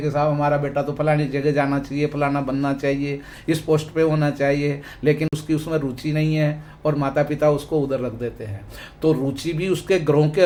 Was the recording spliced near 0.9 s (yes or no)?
no